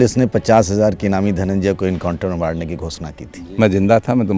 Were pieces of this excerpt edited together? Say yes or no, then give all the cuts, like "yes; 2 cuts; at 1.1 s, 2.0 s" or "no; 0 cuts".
yes; 1 cut; at 3.2 s